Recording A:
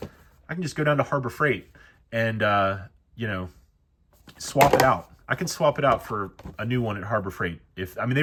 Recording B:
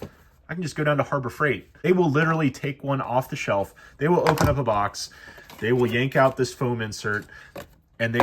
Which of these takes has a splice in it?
B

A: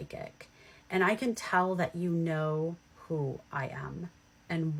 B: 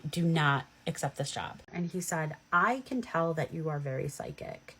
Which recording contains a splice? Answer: B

